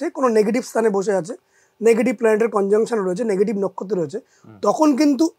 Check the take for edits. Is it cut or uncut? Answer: uncut